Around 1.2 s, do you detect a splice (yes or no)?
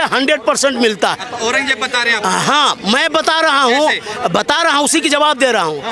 no